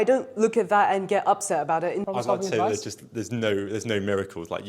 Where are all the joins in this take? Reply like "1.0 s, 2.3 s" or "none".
2.1 s